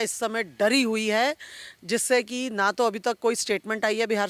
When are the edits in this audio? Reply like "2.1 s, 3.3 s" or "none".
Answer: none

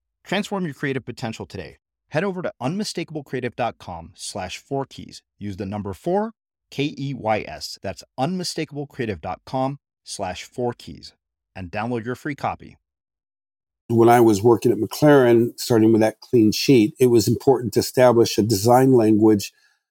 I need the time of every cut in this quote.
13.9 s

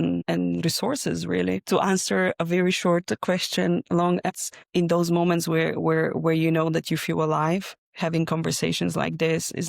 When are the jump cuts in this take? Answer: 1.6 s, 4.4 s

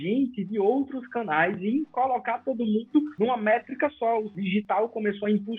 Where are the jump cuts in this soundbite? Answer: 3.1 s, 4.3 s

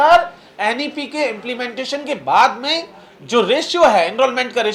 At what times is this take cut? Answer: none

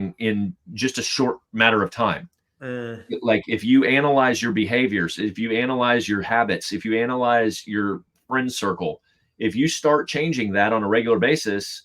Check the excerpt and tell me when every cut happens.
none

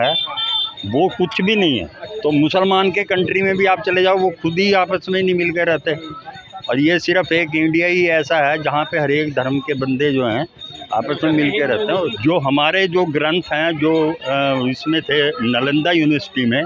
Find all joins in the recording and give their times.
2.0 s, 12.2 s

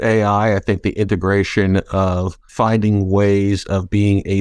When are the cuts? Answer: 2.4 s

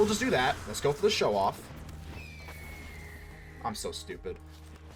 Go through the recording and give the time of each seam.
none

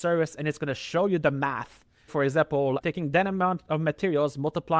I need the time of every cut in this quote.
2.1 s

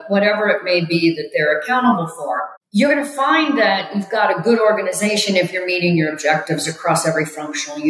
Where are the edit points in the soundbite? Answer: 2.5 s

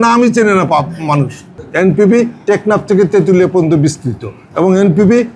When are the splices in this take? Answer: 1.6 s

